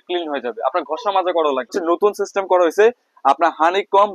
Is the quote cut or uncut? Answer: cut